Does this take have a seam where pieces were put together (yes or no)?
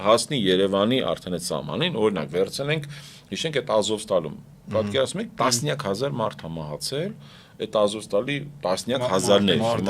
no